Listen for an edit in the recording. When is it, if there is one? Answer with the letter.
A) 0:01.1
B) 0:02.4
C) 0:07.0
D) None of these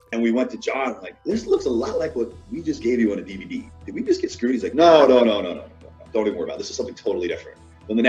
A